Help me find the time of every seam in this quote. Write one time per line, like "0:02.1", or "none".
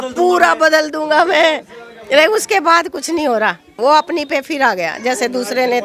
none

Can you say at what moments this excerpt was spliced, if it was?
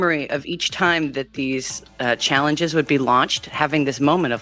none

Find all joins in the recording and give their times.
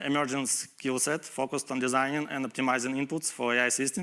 none

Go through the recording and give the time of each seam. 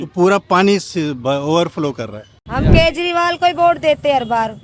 0:02.4

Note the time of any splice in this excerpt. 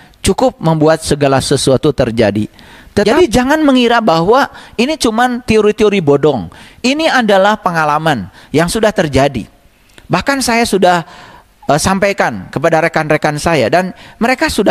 0:03.0

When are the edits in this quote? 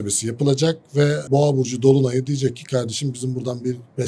0:01.2

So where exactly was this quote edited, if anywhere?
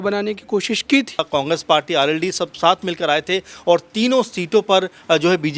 0:01.3

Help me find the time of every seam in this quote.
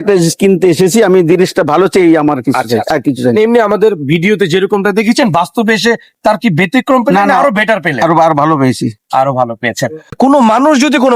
0:10.2

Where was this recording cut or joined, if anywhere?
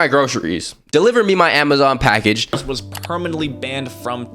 0:00.8
0:02.5

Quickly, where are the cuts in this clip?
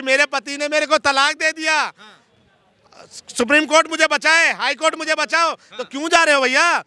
none

